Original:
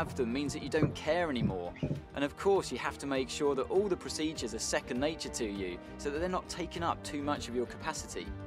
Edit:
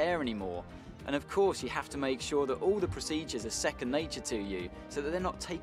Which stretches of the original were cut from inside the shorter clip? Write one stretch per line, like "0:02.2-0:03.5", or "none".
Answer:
none